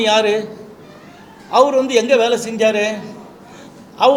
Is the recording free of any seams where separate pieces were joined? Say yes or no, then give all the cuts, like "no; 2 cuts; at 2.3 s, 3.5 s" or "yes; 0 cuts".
yes; 0 cuts